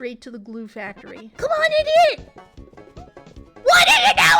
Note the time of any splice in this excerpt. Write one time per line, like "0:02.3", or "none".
0:01.3